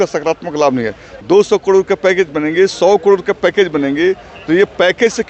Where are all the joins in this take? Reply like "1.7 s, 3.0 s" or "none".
1.1 s